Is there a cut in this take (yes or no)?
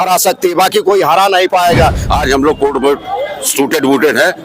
yes